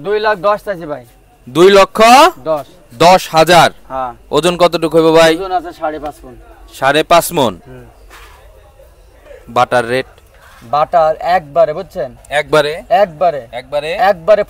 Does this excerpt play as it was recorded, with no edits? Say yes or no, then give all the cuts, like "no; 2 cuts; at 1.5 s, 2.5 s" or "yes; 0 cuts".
yes; 0 cuts